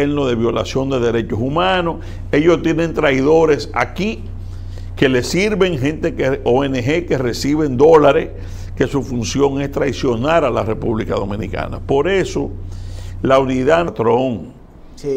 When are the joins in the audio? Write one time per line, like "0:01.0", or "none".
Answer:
0:13.9